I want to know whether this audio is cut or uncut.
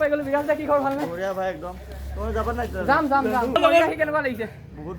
cut